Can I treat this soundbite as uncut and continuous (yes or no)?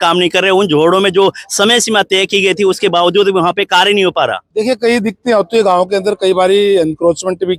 yes